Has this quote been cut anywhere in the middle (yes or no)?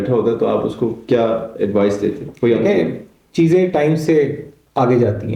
no